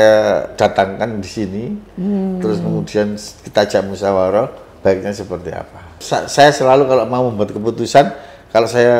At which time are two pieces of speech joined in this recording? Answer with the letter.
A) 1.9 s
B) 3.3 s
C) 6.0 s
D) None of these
C